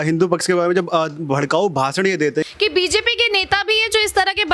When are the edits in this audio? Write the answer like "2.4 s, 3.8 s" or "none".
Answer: 2.5 s